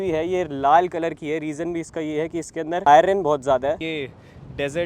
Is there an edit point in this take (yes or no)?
yes